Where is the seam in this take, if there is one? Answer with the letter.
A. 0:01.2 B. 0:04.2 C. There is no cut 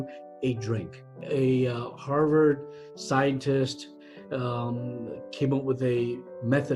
A